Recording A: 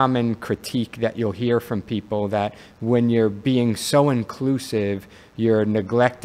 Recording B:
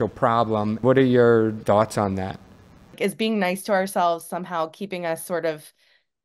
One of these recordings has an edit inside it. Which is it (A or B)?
B